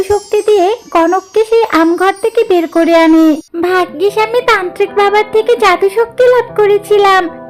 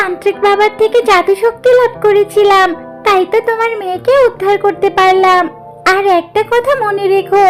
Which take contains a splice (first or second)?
first